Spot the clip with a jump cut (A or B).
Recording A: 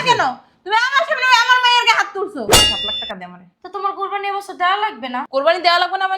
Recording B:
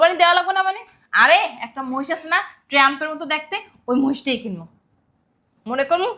A